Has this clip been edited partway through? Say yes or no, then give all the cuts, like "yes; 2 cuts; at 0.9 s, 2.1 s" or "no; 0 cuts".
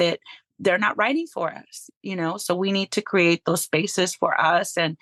no; 0 cuts